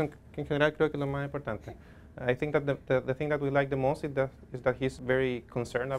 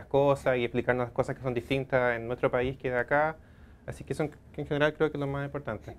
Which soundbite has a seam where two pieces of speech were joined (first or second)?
first